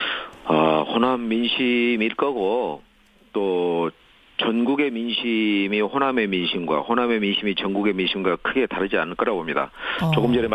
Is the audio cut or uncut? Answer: cut